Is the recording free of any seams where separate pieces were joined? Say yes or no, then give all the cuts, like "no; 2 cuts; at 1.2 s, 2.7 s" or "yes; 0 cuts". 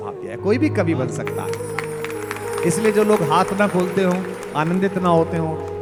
yes; 0 cuts